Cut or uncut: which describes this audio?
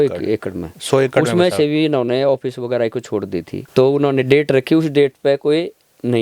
cut